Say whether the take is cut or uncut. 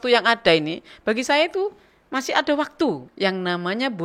cut